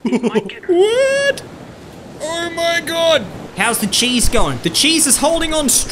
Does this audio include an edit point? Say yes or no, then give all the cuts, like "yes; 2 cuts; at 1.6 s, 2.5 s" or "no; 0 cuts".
yes; 1 cut; at 3.4 s